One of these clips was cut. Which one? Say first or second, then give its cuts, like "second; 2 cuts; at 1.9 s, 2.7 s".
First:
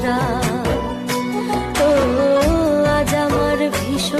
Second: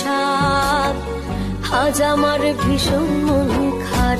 first; 1 cut; at 1.2 s